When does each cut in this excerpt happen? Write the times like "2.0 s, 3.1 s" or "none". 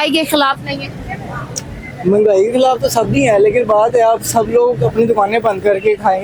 none